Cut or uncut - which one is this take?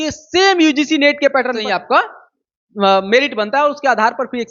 cut